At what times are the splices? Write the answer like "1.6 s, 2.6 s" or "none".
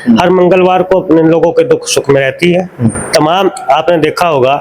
none